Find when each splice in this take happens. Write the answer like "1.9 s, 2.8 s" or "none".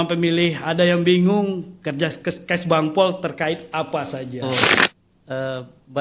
4.7 s